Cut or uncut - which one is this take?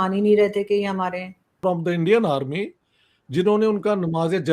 cut